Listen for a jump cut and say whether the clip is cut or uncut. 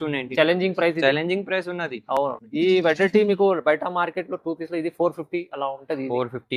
uncut